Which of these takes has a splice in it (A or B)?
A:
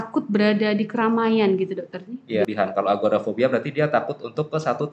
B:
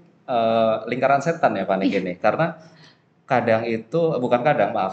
A